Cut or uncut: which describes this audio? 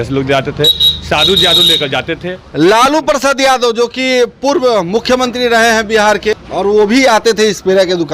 cut